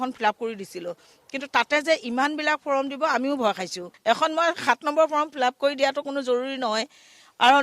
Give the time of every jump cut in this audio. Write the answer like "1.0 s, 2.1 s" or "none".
3.9 s